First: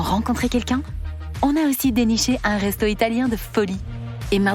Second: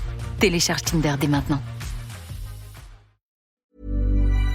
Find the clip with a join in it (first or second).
second